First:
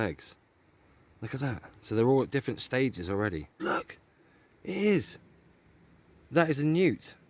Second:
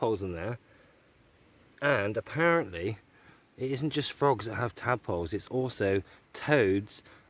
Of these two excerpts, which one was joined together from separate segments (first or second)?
first